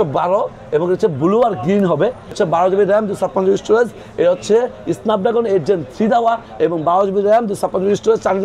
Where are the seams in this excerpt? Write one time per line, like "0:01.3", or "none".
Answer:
0:02.3